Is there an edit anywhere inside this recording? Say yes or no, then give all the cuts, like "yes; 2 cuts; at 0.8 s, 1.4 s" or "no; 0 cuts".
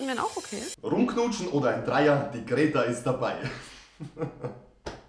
no; 0 cuts